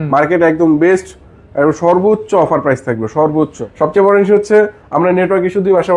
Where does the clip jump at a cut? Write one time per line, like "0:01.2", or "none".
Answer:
0:03.6